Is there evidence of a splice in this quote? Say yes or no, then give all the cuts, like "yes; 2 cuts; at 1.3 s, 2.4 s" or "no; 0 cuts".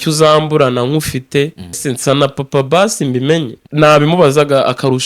yes; 2 cuts; at 1.8 s, 3.6 s